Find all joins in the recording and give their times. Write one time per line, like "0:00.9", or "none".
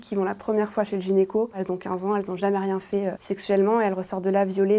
0:01.5
0:03.3